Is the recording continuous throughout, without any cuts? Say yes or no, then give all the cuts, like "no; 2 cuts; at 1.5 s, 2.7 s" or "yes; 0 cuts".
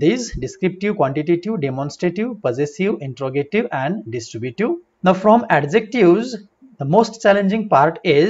no; 1 cut; at 4.9 s